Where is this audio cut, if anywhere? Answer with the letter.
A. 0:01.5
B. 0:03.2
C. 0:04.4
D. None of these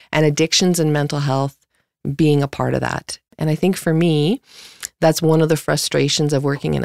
B